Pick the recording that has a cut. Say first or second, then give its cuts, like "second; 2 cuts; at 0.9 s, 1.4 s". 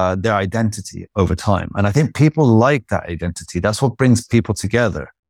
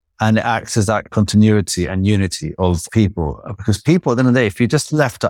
second; 2 cuts; at 1.1 s, 2.8 s